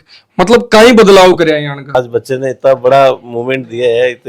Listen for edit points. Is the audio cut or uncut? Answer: cut